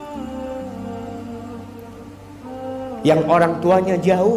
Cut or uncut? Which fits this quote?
uncut